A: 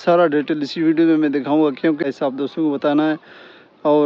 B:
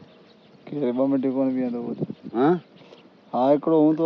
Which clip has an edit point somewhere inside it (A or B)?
A